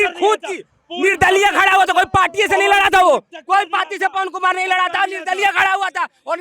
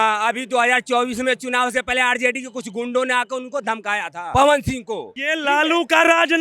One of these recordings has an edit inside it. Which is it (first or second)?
second